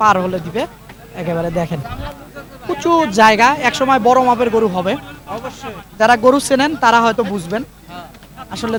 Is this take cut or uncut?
uncut